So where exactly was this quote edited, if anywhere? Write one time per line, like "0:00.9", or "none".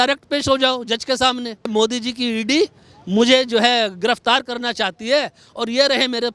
0:01.7